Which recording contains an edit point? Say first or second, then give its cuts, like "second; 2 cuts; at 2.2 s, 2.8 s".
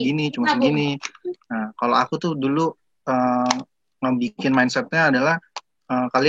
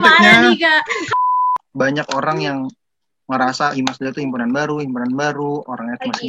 second; 1 cut; at 1.1 s